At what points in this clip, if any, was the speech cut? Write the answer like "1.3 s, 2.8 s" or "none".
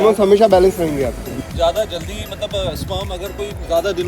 1.2 s